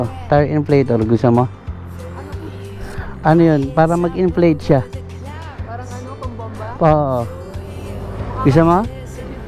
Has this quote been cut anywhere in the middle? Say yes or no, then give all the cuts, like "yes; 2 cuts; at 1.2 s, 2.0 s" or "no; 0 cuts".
no; 0 cuts